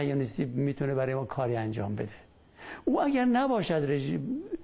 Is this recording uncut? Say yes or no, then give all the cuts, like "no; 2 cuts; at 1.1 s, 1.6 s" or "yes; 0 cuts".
yes; 0 cuts